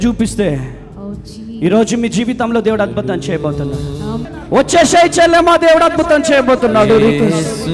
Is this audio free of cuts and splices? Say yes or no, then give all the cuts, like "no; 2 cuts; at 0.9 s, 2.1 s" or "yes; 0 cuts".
no; 1 cut; at 4.2 s